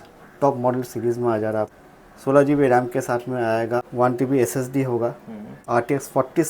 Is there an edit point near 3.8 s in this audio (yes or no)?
yes